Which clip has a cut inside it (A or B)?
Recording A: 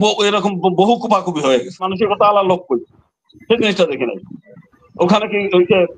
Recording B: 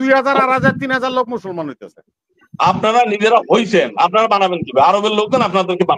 A